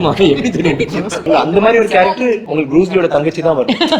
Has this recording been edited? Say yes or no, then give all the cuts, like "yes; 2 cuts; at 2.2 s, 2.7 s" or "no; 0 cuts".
yes; 2 cuts; at 1.3 s, 2.5 s